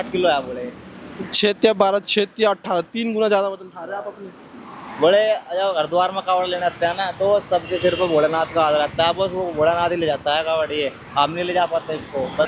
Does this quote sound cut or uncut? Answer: uncut